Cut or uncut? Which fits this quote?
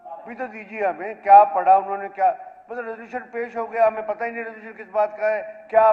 uncut